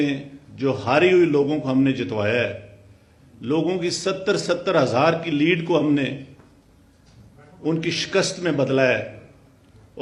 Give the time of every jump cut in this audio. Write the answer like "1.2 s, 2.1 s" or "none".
none

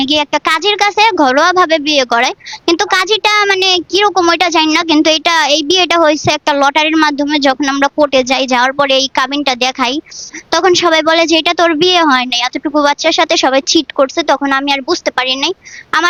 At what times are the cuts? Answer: none

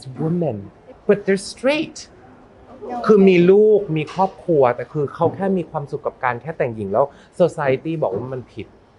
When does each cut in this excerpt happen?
0.9 s

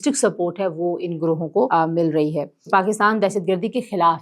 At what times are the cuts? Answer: 1.7 s, 2.7 s

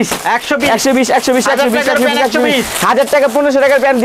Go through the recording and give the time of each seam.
none

